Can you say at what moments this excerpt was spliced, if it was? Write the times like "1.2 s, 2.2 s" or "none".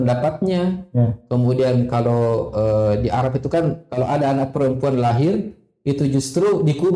none